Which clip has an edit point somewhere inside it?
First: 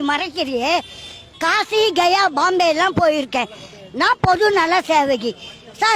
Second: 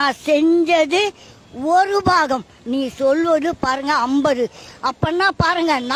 first; 1 cut; at 1.2 s

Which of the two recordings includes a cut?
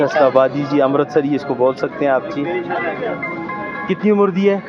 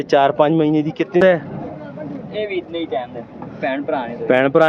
second; 1 cut; at 1.2 s

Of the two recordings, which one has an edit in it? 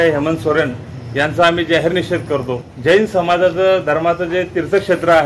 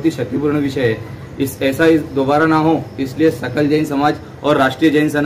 first; 1 cut; at 2.6 s

